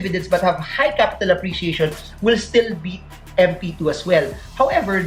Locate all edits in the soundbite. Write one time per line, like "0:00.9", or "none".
none